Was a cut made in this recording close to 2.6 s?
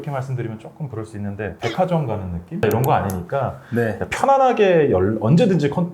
yes; 1 cut; at 2.6 s

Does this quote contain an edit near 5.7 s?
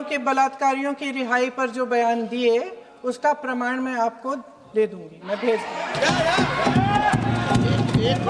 no; 0 cuts

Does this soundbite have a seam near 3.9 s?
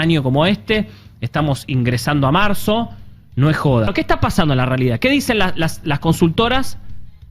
yes; 1 cut; at 3.9 s

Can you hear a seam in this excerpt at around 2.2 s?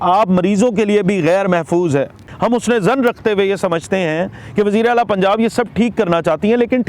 yes; 1 cut; at 2.2 s

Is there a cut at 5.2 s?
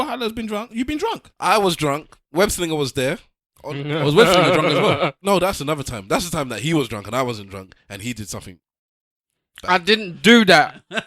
yes; 2 cuts; at 1.3 s, 5.2 s

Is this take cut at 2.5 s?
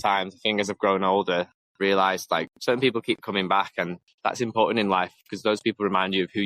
yes; 3 cuts; at 1.6 s, 2.5 s, 4.0 s

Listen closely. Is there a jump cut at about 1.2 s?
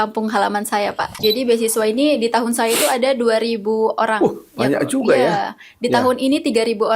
yes; 1 cut; at 1.2 s

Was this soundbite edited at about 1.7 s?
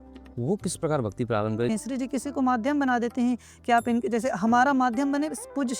yes; 1 cut; at 1.7 s

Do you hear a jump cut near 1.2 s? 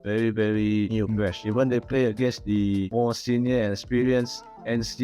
yes; 2 cuts; at 1.2 s, 2.9 s

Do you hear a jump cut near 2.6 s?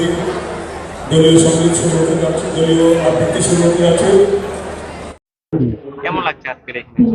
no; 1 cut; at 5.3 s

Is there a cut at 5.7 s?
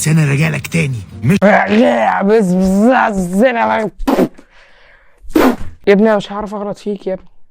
yes; 1 cut; at 5.7 s

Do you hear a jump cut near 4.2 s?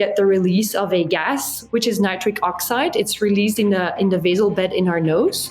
no; 1 cut; at 1.5 s

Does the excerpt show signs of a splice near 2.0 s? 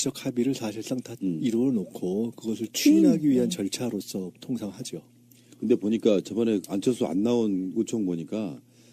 no; 1 cut; at 6.2 s

